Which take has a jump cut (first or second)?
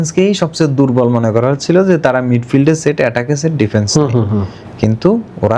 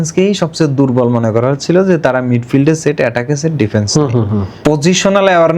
second